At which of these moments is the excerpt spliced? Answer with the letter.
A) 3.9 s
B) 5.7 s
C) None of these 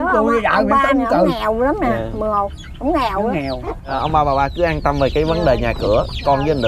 A